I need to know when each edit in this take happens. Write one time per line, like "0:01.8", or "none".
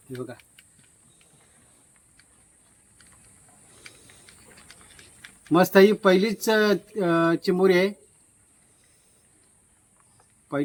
none